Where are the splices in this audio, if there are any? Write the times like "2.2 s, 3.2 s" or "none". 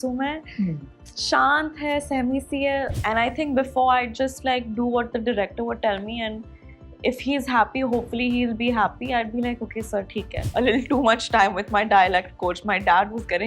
2.9 s, 10.4 s